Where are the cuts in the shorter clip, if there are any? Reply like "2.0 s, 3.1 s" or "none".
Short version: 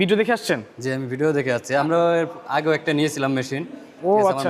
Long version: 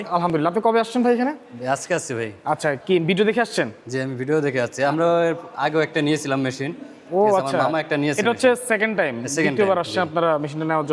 none